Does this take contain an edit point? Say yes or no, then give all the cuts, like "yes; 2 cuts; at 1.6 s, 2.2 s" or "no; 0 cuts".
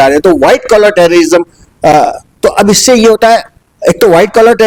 no; 0 cuts